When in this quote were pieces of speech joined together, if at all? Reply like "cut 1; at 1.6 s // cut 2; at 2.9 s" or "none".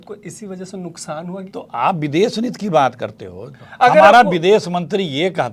cut 1; at 1.5 s